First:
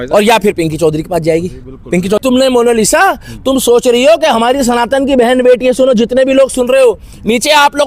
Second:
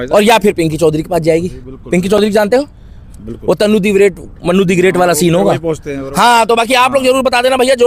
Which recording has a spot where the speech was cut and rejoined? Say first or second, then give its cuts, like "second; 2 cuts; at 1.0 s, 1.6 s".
first; 1 cut; at 2.2 s